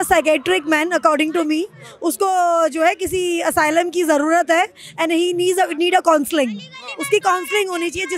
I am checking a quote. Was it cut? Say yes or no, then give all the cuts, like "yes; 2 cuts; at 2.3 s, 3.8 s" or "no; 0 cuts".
no; 0 cuts